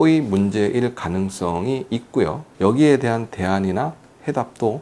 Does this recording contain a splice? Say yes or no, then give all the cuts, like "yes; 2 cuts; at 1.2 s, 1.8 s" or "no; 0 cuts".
yes; 1 cut; at 2.5 s